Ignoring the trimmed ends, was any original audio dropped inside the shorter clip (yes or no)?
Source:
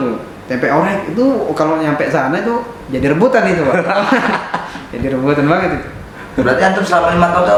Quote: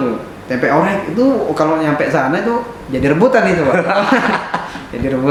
no